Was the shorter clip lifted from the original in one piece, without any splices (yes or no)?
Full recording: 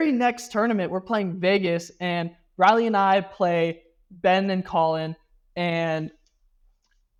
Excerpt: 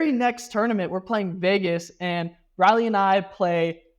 yes